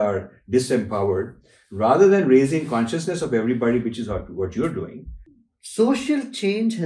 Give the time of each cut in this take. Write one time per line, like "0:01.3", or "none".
0:05.2